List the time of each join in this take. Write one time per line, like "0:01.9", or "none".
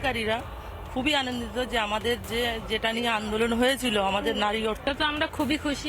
0:04.8